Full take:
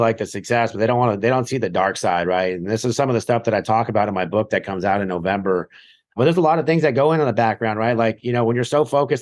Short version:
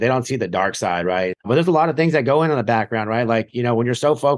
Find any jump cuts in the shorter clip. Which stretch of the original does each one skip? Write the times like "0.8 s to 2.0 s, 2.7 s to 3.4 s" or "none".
2.6 s to 6.1 s

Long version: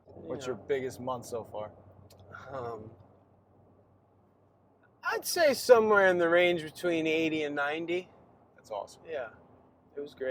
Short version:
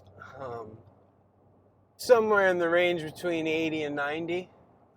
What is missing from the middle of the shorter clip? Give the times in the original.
4.1 s to 5.6 s

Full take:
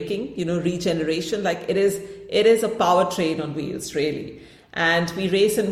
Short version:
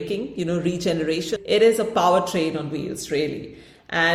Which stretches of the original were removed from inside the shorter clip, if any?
1.3 s to 2.2 s

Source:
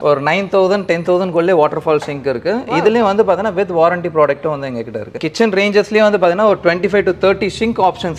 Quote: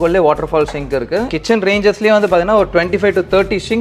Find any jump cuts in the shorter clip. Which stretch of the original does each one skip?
2.6 s to 5.2 s

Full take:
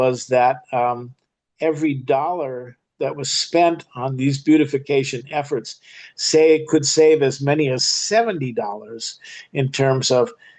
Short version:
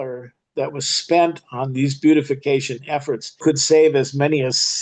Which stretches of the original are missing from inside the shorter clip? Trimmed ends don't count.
5.8 s to 6.6 s

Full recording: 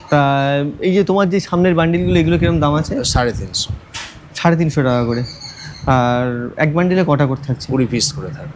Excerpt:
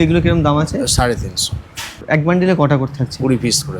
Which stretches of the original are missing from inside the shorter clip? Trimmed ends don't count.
4.2 s to 6.5 s

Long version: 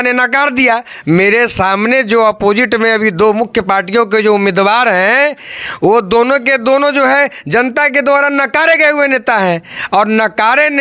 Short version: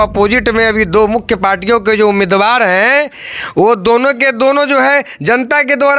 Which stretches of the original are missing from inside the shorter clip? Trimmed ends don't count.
none

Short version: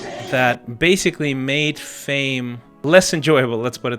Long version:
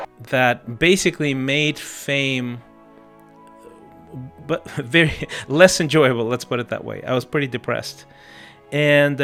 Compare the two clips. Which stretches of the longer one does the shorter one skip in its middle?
2.7 s to 5.3 s

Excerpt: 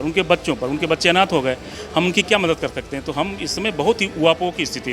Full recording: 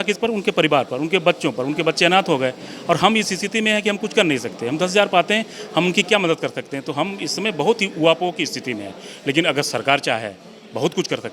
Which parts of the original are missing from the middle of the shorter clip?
2.7 s to 5.5 s

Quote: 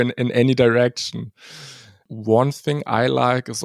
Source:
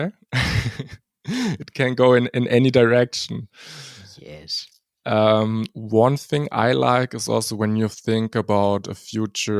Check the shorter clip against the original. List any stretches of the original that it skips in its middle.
4.3 s to 5.8 s

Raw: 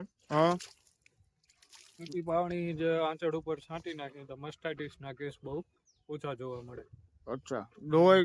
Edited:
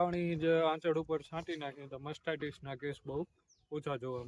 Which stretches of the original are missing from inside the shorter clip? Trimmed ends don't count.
none

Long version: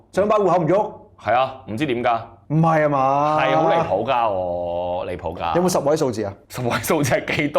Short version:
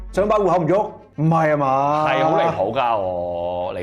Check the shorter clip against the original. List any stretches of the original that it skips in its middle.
1.0 s to 2.4 s

